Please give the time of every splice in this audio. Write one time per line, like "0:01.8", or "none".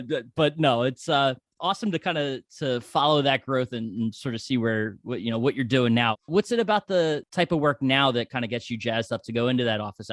0:06.2
0:07.3